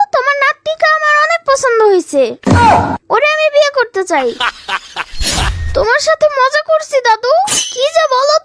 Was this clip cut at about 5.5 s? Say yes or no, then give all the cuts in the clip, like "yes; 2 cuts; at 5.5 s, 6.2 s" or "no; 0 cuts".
yes; 1 cut; at 5.5 s